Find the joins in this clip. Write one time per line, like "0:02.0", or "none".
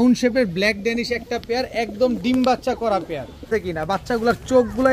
0:03.5